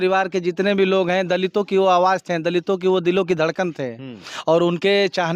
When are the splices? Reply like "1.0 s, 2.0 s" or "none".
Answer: none